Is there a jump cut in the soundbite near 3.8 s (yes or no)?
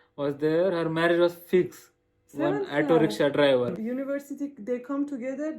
yes